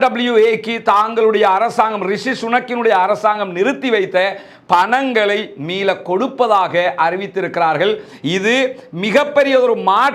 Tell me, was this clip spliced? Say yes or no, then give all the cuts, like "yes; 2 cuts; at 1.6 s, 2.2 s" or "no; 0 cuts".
no; 0 cuts